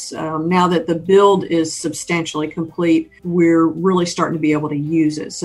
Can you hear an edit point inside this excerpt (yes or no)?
yes